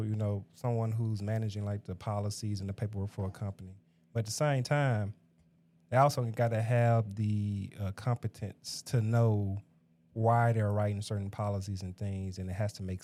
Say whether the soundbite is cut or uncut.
uncut